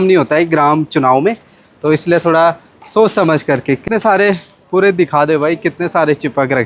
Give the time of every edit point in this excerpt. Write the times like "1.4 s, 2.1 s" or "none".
3.8 s